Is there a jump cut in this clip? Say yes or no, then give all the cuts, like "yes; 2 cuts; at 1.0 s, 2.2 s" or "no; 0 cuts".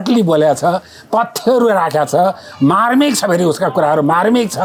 no; 0 cuts